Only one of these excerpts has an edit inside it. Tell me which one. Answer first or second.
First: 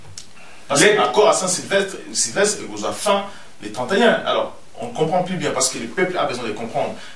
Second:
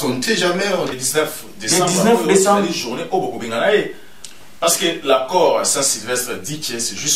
second